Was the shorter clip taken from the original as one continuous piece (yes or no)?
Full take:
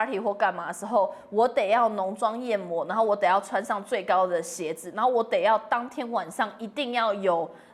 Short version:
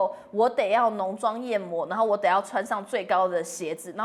yes